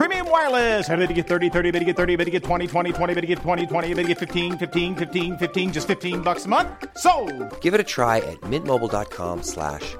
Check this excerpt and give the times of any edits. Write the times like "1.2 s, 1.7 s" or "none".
none